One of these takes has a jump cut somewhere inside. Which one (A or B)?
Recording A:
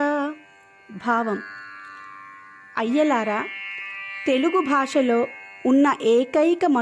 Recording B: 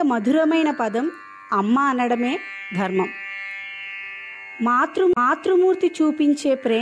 B